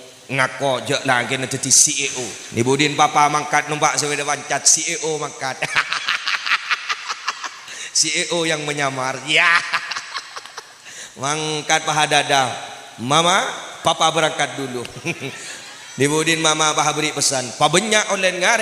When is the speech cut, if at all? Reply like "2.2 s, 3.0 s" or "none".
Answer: 2.4 s